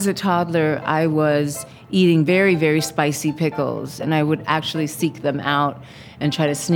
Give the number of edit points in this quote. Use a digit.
2